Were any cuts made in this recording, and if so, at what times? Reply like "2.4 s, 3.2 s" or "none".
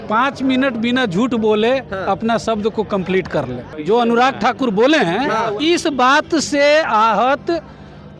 3.6 s, 5.6 s